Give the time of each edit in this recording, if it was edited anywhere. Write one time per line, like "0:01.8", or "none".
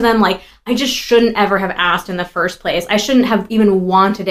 none